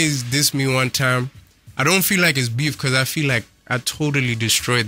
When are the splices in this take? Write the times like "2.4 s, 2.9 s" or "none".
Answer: none